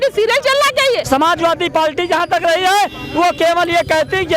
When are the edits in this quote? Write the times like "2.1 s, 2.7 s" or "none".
1.0 s

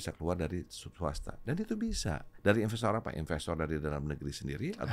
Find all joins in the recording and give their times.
2.3 s

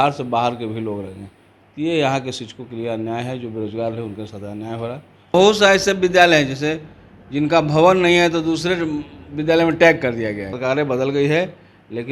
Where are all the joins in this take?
5.3 s, 10.5 s

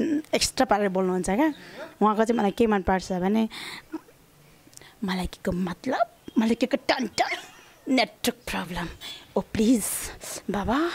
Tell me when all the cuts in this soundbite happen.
none

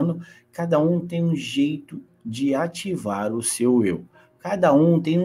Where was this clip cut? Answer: none

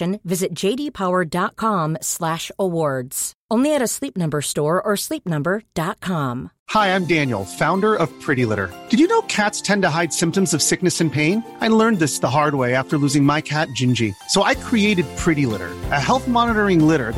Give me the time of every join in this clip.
6.6 s

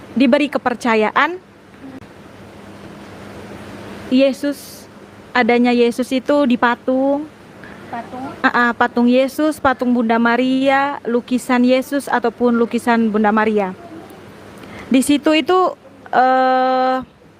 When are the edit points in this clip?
none

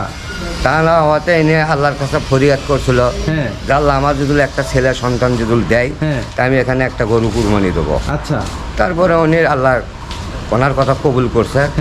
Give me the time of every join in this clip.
none

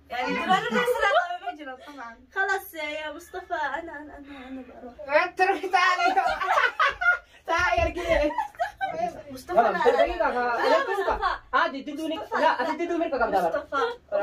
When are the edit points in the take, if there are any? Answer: 9.2 s

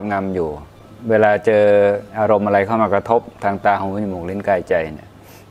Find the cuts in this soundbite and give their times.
none

